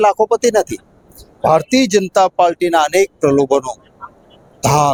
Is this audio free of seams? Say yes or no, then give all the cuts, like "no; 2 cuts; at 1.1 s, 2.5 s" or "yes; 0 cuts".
yes; 0 cuts